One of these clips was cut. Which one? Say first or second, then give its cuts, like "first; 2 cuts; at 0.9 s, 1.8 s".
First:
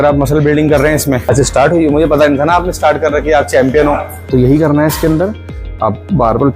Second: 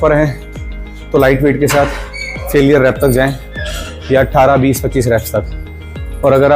first; 2 cuts; at 1.2 s, 4.1 s